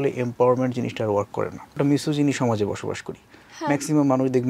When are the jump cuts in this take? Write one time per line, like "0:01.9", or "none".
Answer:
0:01.8

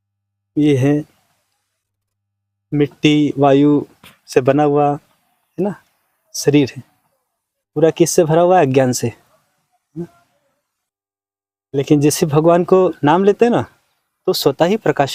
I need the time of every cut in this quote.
none

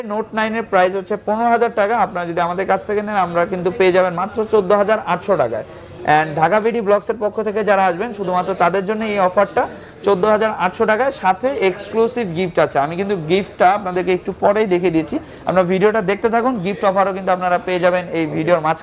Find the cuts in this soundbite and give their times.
none

